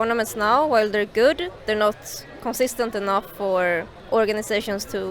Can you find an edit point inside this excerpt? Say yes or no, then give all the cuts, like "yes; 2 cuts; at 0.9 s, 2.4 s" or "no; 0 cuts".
yes; 1 cut; at 3.9 s